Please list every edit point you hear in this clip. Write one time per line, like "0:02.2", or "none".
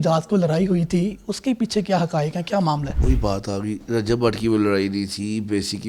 0:02.9

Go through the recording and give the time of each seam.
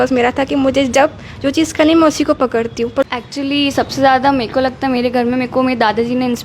0:03.0

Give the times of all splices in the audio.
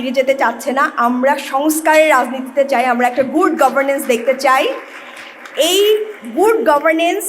none

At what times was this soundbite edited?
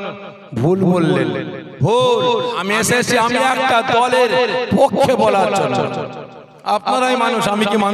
0:02.6

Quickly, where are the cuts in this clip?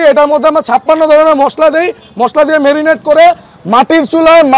none

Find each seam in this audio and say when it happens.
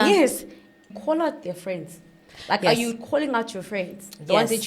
0:00.9

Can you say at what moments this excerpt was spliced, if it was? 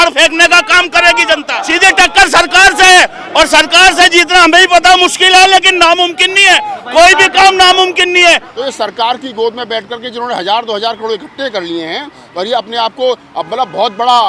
0:01.6
0:08.5

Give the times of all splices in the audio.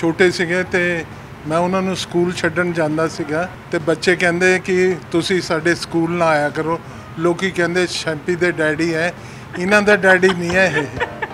0:03.6

